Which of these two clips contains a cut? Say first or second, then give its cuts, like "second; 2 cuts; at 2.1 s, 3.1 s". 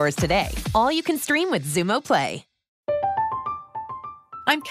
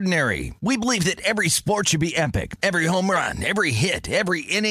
first; 1 cut; at 2.7 s